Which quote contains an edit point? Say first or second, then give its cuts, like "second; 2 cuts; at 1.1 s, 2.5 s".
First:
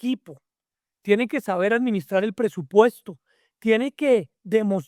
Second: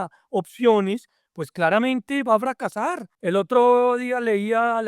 second; 1 cut; at 3.1 s